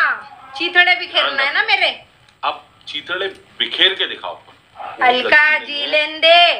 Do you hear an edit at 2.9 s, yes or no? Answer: no